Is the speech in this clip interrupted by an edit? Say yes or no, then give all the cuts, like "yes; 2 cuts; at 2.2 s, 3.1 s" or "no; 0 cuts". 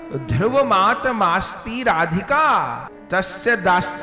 yes; 1 cut; at 2.9 s